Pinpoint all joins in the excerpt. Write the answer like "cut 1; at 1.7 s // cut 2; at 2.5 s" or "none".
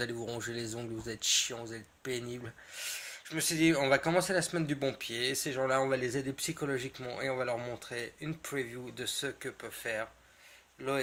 none

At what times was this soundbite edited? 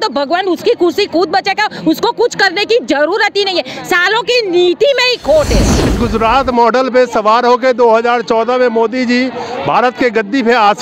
cut 1; at 5.9 s

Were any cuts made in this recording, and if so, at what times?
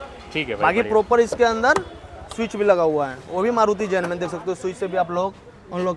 none

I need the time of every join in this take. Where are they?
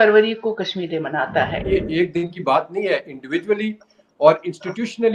cut 1; at 1.7 s

